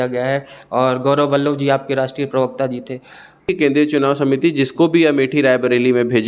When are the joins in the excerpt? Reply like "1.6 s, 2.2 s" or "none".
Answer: 3.5 s